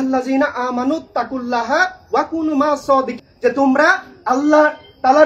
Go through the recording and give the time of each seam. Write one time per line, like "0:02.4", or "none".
0:03.2